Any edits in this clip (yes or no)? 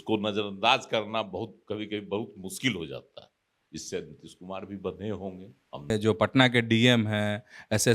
yes